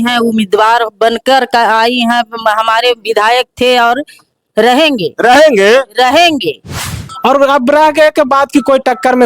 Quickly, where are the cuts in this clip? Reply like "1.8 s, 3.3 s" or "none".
7.1 s